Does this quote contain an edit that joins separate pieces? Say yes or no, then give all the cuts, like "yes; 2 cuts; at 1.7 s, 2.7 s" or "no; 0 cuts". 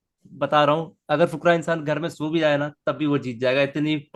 no; 0 cuts